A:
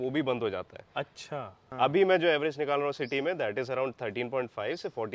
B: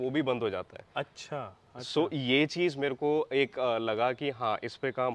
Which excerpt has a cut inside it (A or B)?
A